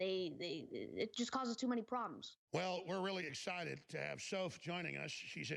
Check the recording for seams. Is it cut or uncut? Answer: uncut